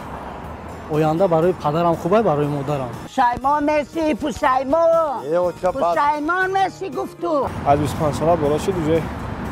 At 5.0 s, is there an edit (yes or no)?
no